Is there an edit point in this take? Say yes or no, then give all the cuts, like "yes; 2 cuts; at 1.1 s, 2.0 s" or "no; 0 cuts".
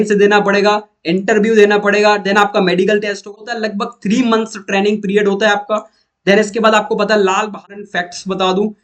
yes; 2 cuts; at 3.4 s, 7.6 s